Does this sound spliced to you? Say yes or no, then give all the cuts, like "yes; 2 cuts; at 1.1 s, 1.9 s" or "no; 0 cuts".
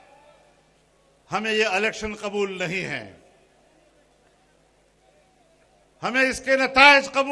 no; 0 cuts